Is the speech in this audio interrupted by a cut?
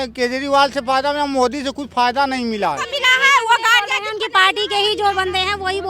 yes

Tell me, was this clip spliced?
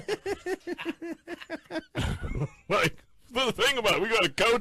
no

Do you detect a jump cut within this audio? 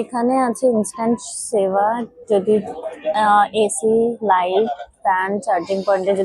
no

